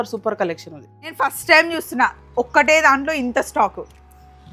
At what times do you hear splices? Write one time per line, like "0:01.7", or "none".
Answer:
0:01.2